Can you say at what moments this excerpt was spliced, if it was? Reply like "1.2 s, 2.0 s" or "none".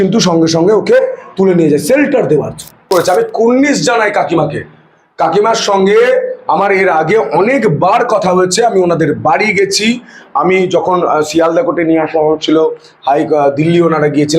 2.8 s